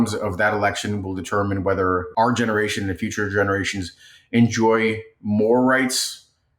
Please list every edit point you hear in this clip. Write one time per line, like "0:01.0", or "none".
0:02.1